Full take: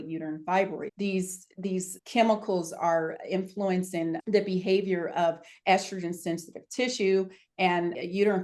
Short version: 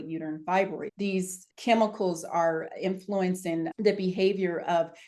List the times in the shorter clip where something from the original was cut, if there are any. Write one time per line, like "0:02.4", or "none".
0:01.5